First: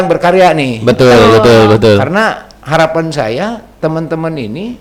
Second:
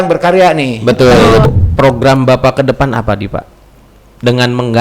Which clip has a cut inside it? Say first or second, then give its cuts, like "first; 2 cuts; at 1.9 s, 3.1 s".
second; 1 cut; at 1.4 s